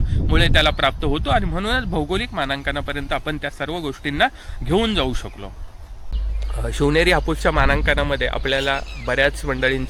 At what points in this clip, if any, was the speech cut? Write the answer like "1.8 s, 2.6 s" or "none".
none